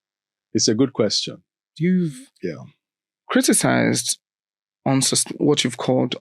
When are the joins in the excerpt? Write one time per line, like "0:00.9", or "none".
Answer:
0:01.7